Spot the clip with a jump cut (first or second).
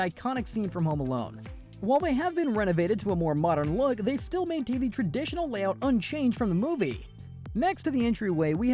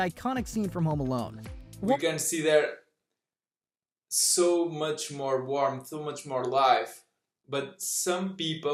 first